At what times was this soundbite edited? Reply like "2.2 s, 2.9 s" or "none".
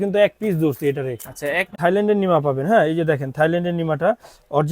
1.7 s